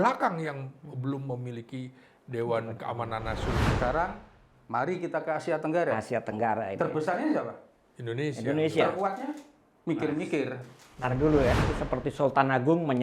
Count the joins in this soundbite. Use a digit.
2